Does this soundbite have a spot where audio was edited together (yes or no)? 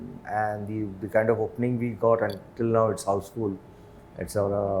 no